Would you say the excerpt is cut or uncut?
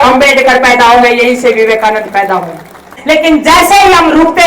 cut